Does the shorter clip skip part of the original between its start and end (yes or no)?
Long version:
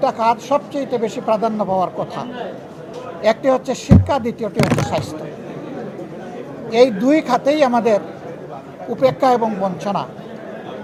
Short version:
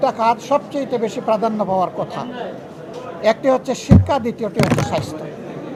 no